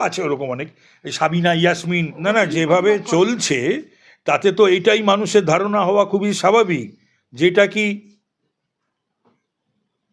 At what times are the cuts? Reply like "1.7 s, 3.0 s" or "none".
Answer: 2.2 s